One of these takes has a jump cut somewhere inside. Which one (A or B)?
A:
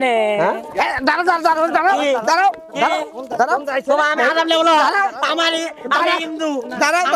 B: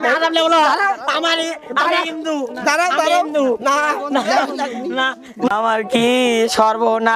B